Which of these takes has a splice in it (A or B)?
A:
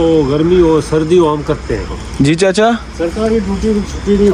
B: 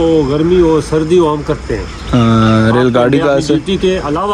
A